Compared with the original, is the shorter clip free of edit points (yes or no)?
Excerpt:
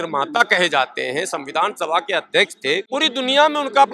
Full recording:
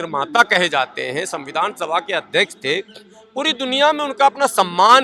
no